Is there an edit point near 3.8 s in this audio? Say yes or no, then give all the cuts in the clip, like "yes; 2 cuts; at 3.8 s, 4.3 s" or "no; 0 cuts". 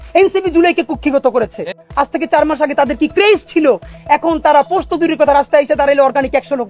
no; 1 cut; at 1.8 s